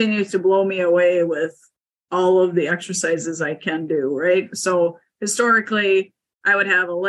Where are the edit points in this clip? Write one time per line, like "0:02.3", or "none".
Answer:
none